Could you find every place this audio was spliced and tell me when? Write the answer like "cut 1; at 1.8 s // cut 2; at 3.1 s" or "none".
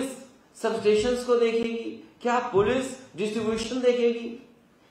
none